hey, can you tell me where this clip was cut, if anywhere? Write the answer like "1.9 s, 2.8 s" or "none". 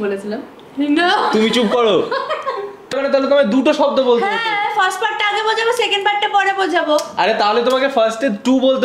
3.0 s